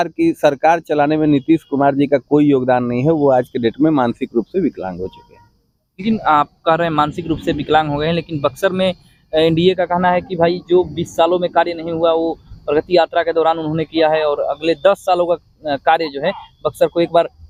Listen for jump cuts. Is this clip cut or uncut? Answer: uncut